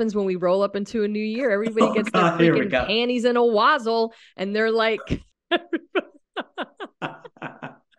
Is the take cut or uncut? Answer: cut